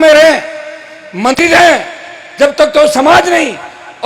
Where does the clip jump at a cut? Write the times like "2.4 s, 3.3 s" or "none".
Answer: 1.4 s